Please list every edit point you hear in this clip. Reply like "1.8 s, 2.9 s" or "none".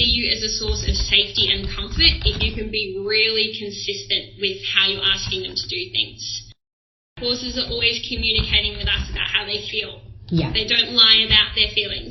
7.1 s